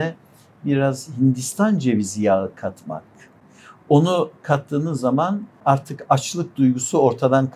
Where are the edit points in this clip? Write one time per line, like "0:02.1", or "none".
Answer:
0:05.6